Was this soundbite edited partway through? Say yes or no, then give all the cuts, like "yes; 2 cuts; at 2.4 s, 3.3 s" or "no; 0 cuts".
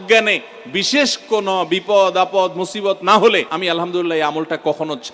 yes; 1 cut; at 3.5 s